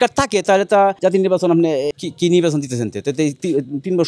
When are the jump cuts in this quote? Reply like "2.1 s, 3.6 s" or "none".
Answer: 1.0 s, 1.9 s